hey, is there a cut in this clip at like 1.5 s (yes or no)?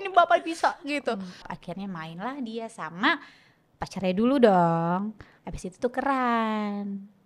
yes